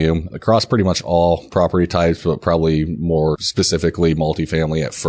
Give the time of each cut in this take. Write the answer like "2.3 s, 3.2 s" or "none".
3.4 s